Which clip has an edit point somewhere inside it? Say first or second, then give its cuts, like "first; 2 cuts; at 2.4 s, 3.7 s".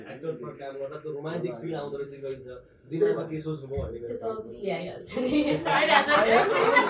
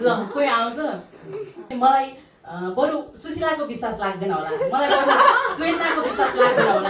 second; 1 cut; at 1.6 s